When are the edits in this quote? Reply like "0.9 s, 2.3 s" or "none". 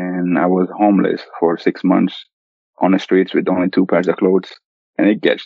none